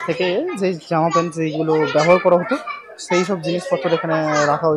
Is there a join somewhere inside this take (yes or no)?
no